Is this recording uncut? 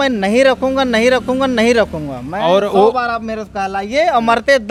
yes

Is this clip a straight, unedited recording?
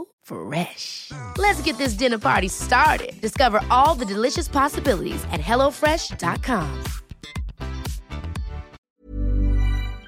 no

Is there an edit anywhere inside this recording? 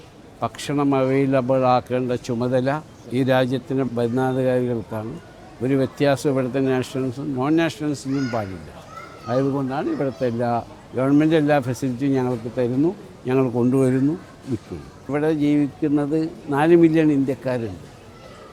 yes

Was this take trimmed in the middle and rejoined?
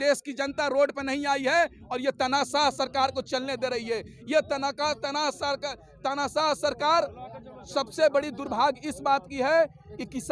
no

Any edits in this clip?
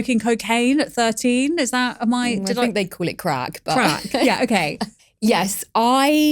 yes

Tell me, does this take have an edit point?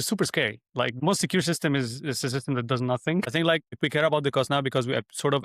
yes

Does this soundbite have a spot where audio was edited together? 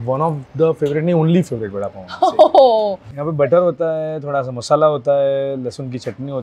yes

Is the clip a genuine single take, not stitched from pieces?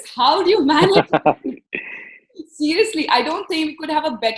yes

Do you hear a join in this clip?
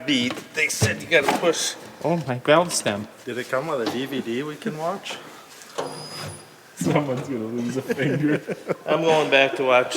yes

